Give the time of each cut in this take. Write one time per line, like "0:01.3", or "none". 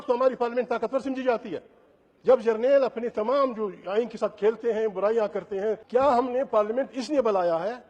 0:05.8